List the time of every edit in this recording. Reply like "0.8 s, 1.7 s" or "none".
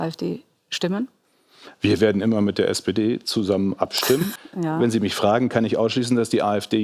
4.3 s